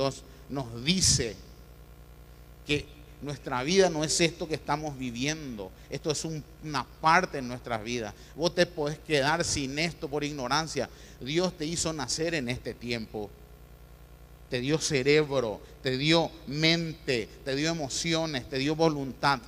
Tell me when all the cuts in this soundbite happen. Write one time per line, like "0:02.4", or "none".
0:13.1